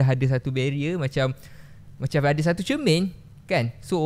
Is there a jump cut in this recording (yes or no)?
no